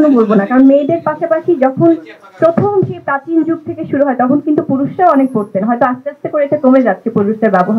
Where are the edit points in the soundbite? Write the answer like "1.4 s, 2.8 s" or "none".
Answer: none